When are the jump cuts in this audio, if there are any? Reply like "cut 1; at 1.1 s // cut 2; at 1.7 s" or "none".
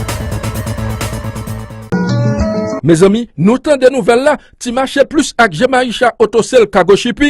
cut 1; at 1.8 s